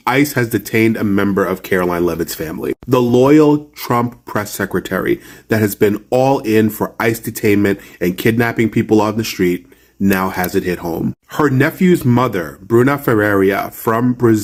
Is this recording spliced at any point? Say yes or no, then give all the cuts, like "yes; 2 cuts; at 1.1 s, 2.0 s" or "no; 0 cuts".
no; 0 cuts